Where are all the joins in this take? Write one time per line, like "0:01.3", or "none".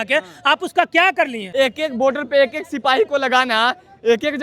0:01.4